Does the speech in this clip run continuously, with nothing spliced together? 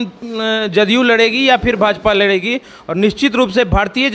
yes; 0 cuts

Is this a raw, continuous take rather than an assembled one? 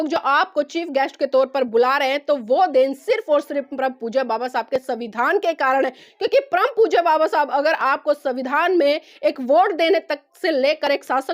yes; 0 cuts

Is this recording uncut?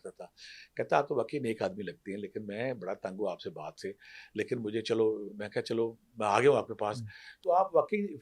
yes; 0 cuts

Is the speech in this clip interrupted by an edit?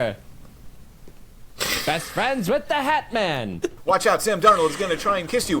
yes; 1 cut; at 3.8 s

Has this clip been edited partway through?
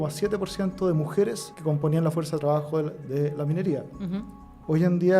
yes; 1 cut; at 1.5 s

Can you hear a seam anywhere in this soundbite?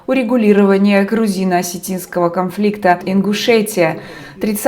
yes; 1 cut; at 3.0 s

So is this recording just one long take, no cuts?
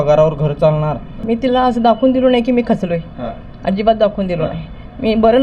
no; 1 cut; at 1.1 s

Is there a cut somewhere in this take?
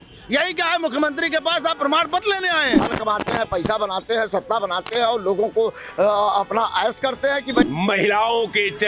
yes; 2 cuts; at 2.8 s, 7.6 s

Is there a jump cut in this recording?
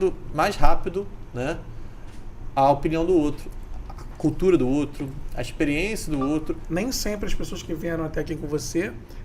yes; 1 cut; at 6.6 s

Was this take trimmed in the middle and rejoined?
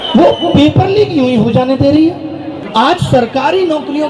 yes; 1 cut; at 2.5 s

